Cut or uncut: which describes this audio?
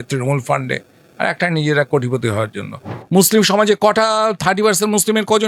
cut